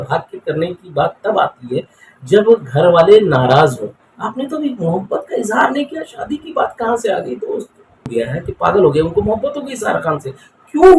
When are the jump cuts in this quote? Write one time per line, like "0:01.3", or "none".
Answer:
0:08.1